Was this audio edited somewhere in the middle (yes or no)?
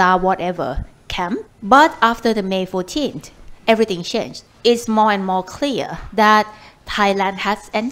yes